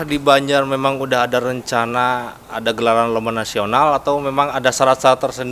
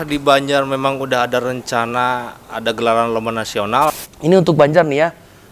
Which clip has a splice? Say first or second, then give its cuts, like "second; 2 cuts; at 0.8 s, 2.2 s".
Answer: second; 1 cut; at 3.9 s